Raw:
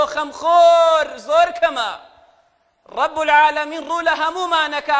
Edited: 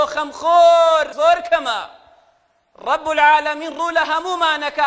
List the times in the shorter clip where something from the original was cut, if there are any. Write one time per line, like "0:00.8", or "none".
0:01.1